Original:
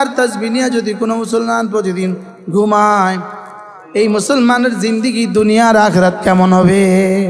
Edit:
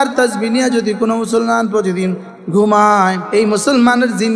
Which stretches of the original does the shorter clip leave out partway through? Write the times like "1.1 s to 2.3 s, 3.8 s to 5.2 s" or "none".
3.2 s to 3.8 s